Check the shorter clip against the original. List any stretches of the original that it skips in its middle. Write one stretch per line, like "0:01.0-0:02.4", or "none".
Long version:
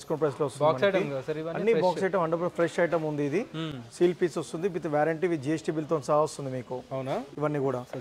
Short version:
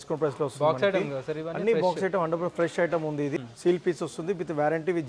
0:03.4-0:03.7